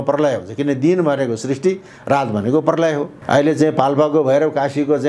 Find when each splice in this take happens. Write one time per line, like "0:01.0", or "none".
0:03.1